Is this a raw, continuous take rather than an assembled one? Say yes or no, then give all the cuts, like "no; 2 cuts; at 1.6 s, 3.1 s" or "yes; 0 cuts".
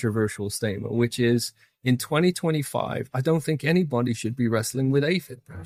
yes; 0 cuts